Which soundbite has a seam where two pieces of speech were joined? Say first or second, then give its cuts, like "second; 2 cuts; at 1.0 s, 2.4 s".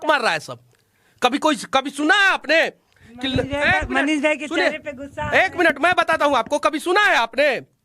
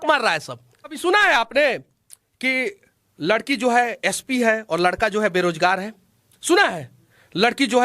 second; 1 cut; at 1.0 s